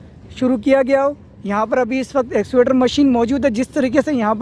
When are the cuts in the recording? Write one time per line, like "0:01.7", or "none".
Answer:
none